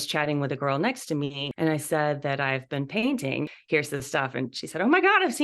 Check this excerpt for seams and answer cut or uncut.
cut